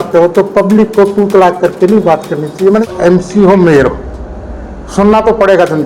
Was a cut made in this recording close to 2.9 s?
yes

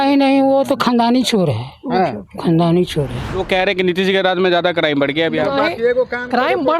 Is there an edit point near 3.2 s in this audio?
yes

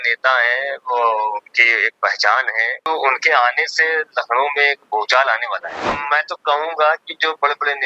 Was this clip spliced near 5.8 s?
yes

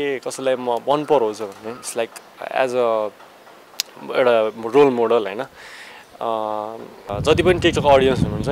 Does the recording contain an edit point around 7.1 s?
yes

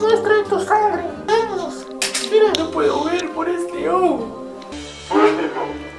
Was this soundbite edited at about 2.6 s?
no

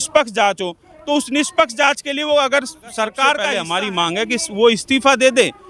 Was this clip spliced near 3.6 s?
yes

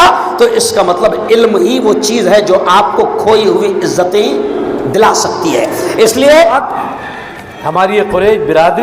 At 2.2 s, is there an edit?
no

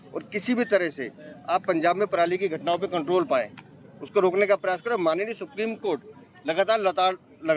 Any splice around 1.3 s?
no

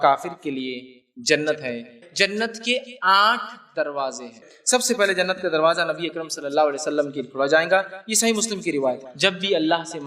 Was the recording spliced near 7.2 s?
no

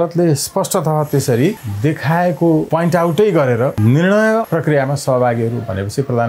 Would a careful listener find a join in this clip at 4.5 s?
yes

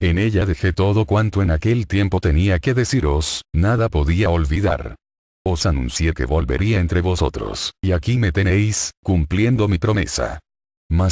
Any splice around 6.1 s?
no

